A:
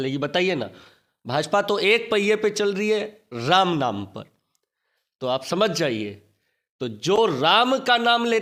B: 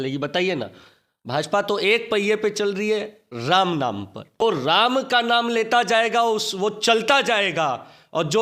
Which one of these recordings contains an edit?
B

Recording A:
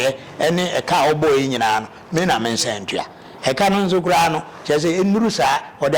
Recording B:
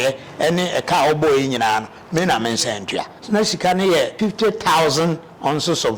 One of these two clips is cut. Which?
B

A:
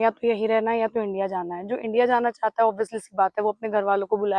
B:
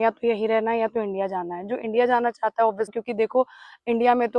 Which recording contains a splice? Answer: B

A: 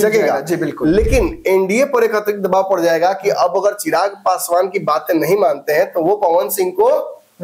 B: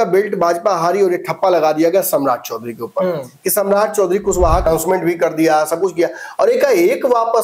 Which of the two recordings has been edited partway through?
B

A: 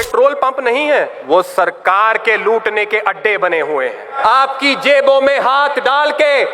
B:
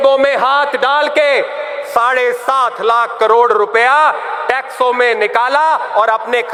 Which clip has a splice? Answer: A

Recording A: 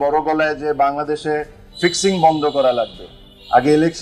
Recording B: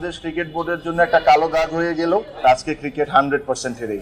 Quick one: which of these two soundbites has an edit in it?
B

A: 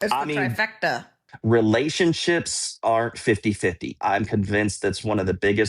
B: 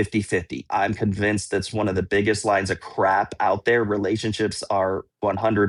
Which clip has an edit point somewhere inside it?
A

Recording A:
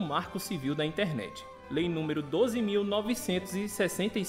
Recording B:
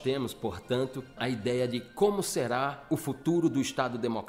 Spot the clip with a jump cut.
B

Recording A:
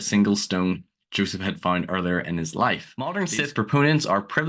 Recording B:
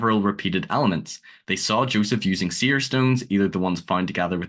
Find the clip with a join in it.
A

